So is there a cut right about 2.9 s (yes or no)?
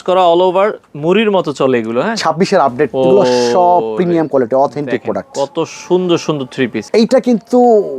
yes